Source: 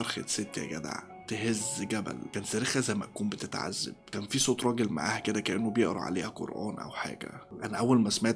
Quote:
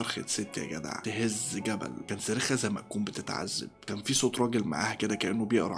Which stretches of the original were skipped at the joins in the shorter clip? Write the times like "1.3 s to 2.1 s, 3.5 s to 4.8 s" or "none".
1.0 s to 1.2 s